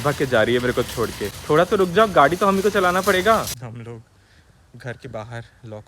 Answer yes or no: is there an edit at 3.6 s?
yes